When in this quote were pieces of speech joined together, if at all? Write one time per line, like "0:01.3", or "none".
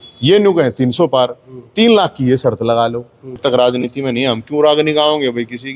0:03.4